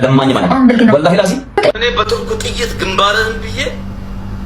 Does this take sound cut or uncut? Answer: cut